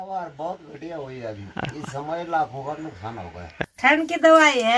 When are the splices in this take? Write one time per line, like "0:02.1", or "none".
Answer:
0:03.5